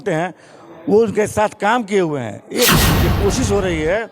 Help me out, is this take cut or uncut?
cut